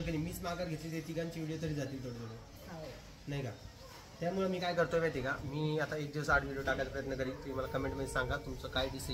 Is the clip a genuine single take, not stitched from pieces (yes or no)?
yes